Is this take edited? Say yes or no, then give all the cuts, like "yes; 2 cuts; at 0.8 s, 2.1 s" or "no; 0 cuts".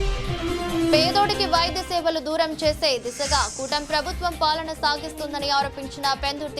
yes; 1 cut; at 0.9 s